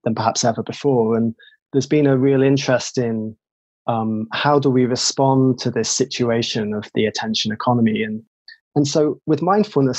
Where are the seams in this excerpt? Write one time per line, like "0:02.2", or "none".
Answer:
0:08.4

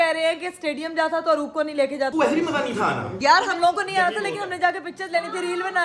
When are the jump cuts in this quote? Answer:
0:02.1
0:03.1

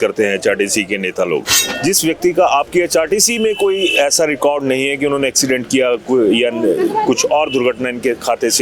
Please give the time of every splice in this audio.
0:01.6

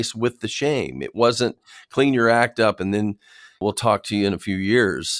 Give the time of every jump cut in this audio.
0:03.6

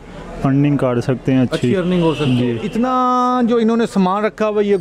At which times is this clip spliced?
0:02.6

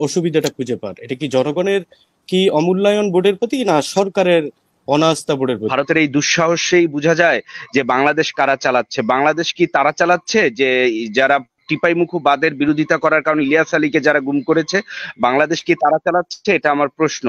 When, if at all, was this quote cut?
0:05.7

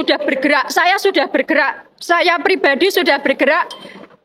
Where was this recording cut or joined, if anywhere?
none

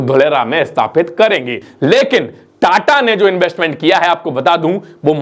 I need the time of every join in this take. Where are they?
0:01.7

